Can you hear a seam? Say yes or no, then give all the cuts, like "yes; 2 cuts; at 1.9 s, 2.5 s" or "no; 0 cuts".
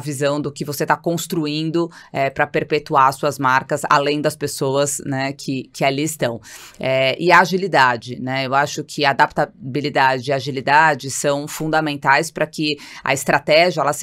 no; 0 cuts